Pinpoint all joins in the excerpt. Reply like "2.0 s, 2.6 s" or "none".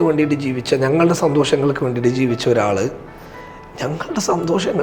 none